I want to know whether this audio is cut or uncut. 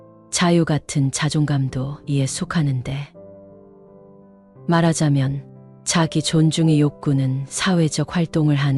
uncut